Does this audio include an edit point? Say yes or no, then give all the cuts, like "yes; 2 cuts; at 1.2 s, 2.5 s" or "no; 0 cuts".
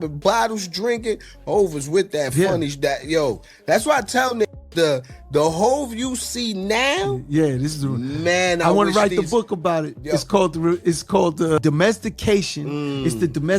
yes; 1 cut; at 11.6 s